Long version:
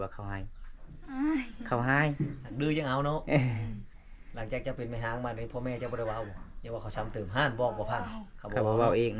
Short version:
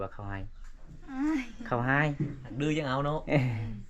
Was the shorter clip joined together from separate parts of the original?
no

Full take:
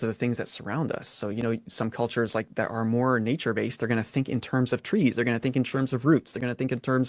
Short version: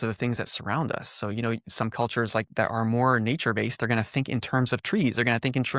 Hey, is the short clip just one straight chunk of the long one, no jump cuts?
yes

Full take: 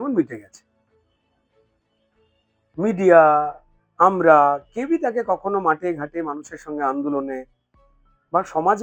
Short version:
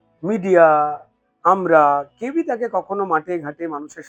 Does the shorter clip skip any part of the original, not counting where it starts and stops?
no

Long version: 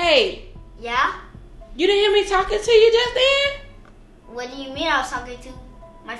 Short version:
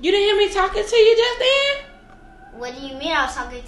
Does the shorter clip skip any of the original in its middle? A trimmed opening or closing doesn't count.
no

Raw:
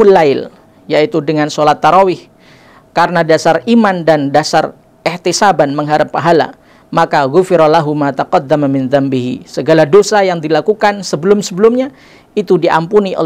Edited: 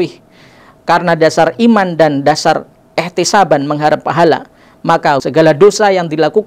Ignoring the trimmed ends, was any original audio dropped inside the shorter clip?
yes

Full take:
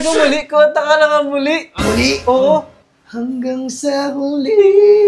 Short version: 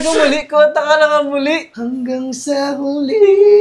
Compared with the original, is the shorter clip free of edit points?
no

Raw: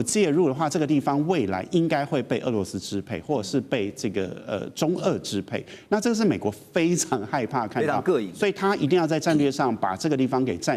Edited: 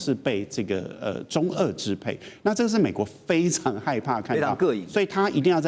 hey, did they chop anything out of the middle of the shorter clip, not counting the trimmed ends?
no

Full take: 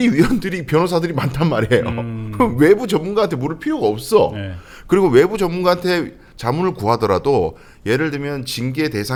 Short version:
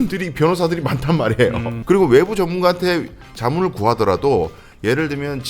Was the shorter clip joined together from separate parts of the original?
yes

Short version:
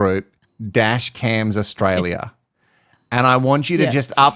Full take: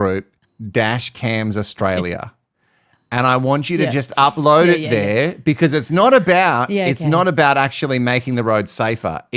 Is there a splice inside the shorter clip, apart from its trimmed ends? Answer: no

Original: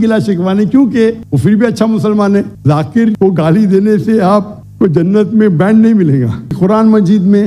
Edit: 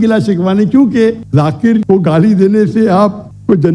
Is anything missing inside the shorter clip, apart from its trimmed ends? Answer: yes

